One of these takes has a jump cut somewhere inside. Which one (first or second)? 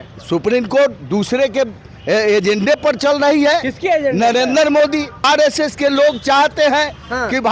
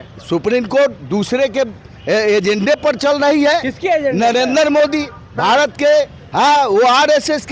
first